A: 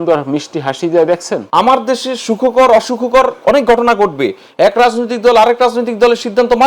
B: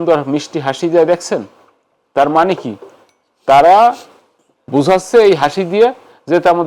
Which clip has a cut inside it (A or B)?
A